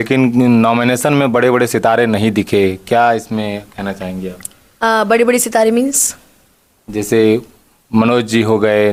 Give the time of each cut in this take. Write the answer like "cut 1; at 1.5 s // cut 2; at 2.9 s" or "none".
none